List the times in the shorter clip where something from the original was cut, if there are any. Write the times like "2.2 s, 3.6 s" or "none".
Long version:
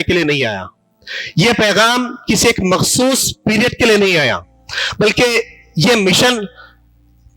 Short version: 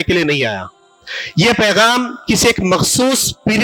none